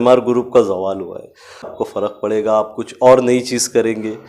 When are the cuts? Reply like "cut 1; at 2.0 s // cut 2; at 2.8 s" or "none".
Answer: cut 1; at 1.7 s